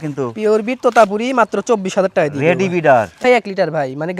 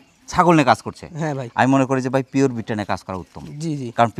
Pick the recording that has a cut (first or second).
first